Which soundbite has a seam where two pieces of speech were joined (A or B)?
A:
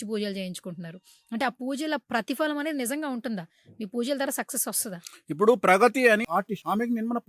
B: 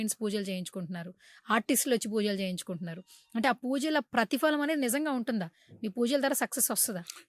A